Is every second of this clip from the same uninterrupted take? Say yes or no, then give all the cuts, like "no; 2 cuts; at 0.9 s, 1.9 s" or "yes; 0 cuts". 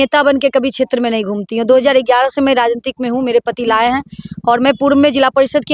yes; 0 cuts